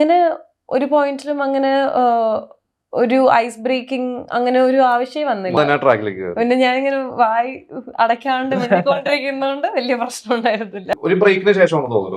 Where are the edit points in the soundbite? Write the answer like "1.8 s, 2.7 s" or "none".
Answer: 5.6 s, 10.9 s